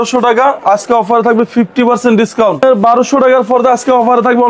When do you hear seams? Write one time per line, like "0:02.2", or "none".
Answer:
0:02.6

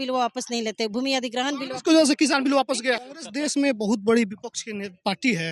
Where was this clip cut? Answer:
0:03.1

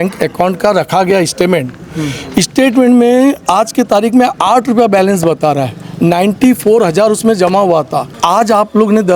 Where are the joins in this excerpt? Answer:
0:08.1

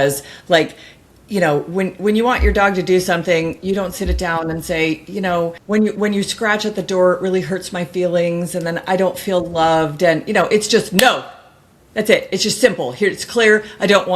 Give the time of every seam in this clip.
0:05.6

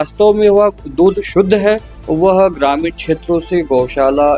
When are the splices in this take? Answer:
0:01.9

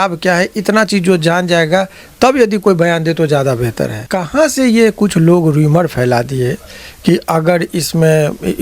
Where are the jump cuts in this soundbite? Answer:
0:04.1

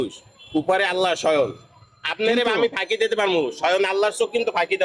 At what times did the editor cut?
none

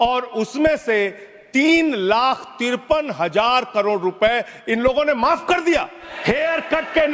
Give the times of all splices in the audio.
0:06.0

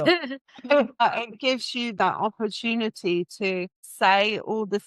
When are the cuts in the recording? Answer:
0:01.0
0:03.8

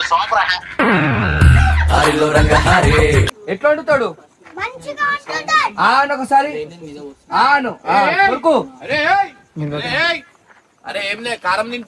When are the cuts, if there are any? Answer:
0:03.3

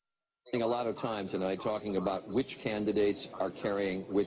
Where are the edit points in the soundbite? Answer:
0:02.3

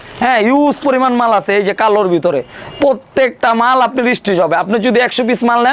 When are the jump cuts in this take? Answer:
none

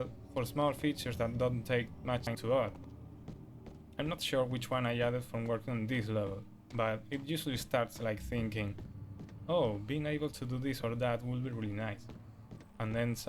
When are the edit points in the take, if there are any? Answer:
0:02.3

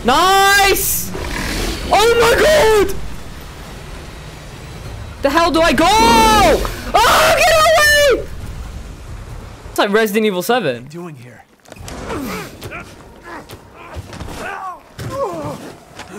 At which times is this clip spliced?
0:09.7

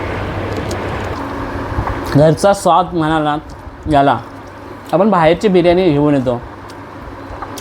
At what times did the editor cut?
0:01.1

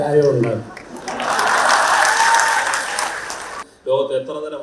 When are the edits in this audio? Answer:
0:03.6

